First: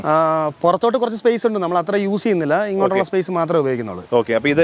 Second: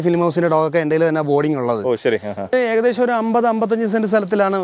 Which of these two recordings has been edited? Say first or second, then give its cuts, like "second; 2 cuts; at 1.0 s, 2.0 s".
second; 1 cut; at 2.5 s